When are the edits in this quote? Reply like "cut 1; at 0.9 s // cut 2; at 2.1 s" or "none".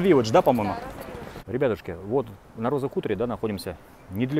cut 1; at 1.1 s